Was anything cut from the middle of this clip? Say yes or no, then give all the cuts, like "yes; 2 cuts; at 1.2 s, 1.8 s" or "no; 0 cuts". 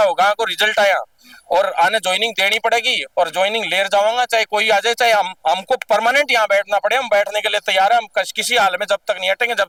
no; 0 cuts